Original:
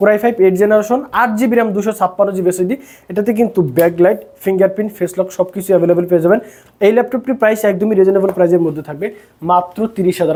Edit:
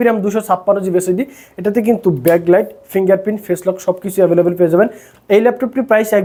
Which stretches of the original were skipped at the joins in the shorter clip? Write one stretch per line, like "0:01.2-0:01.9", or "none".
none